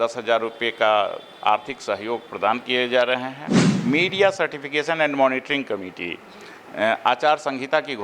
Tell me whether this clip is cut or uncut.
cut